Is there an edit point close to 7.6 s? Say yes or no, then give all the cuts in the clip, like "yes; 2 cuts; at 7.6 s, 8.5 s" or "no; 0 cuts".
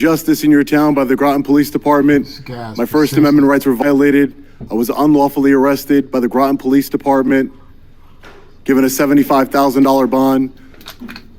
no; 0 cuts